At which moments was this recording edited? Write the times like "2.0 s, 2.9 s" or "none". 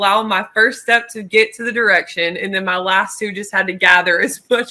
none